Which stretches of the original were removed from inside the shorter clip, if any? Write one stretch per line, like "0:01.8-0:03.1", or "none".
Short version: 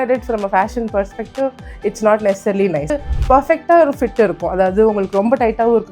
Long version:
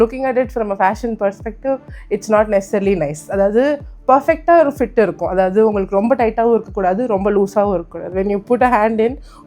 0:03.2-0:03.7